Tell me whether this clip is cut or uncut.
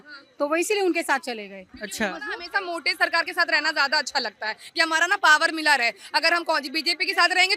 uncut